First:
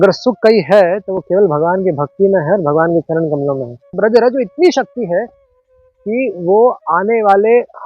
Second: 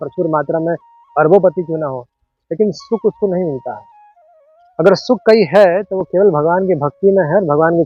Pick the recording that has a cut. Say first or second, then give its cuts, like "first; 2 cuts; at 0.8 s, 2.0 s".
first; 1 cut; at 3.9 s